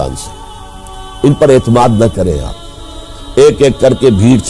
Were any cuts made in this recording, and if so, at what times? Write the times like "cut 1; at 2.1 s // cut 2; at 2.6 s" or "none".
cut 1; at 3.1 s